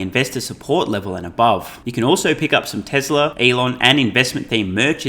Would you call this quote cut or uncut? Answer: cut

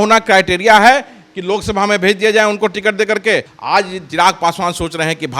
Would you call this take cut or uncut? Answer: cut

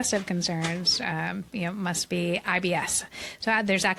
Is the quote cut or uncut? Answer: uncut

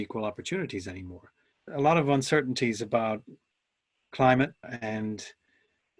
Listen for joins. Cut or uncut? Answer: cut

